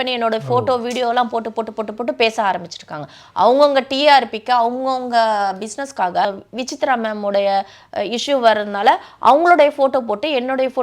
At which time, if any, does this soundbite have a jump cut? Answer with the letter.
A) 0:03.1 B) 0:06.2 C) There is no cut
B